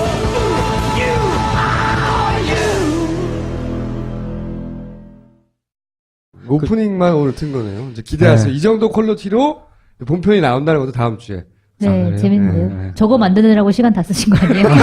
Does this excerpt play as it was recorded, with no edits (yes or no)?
no